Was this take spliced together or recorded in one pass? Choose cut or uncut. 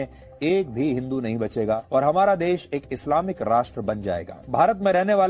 cut